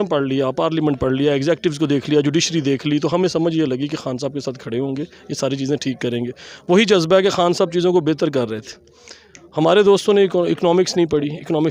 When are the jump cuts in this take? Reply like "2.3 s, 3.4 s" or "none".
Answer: none